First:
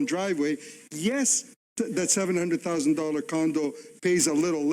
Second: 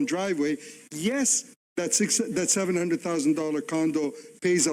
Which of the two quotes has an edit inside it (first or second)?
first